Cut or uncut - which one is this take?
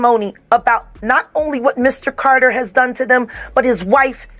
uncut